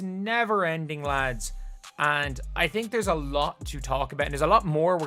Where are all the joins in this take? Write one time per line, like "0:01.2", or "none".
none